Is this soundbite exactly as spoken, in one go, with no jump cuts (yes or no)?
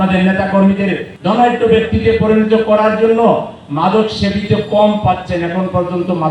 no